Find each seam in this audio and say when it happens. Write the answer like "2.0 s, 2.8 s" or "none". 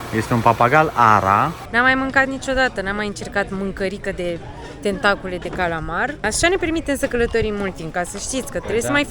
1.6 s, 6.2 s